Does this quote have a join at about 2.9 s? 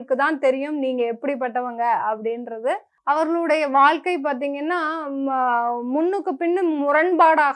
yes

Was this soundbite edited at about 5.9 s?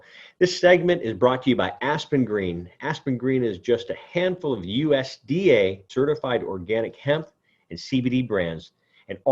yes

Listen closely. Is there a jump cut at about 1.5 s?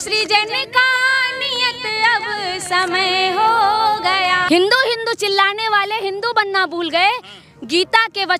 no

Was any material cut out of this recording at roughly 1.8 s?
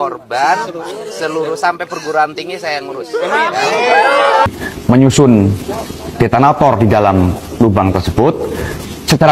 no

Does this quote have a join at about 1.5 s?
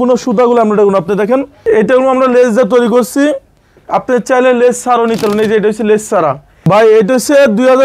yes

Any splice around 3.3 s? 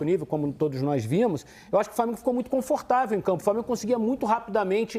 no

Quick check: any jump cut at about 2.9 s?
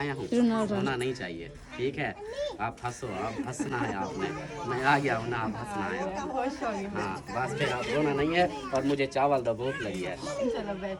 no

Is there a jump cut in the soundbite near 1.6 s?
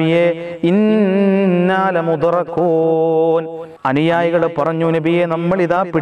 no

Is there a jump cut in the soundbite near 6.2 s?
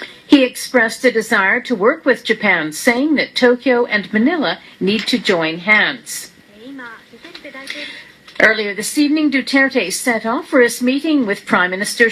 yes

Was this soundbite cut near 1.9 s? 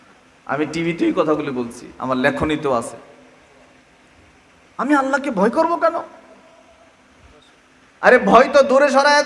no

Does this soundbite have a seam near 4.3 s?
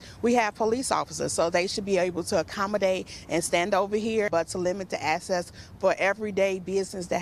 yes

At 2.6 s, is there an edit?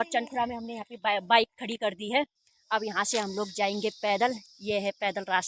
no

